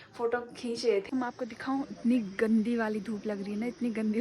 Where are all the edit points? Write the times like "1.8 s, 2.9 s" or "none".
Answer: 1.1 s